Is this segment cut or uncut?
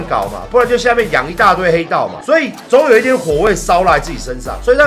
uncut